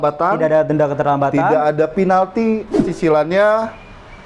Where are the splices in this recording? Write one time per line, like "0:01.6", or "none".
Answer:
0:02.9